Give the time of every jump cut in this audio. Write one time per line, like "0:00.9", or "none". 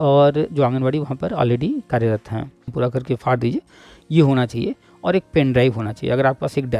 0:02.6